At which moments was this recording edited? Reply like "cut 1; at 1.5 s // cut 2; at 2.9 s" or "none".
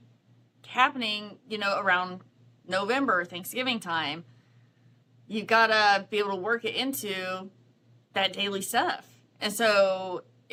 none